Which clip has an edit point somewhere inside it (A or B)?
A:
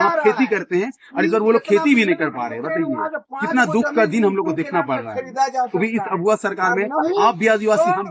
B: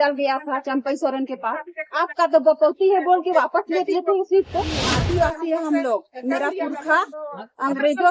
B